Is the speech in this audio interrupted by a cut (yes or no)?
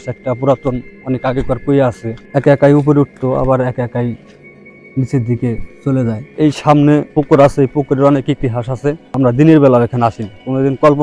yes